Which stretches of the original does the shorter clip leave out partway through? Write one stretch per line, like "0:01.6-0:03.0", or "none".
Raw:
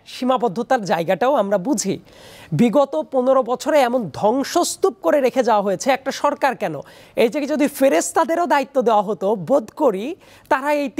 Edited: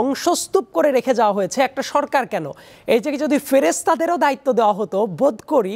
none